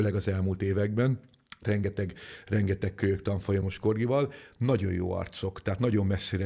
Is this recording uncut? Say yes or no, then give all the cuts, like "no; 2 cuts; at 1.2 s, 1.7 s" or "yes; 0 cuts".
yes; 0 cuts